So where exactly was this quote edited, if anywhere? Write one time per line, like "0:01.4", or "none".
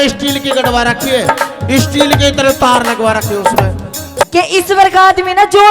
0:04.2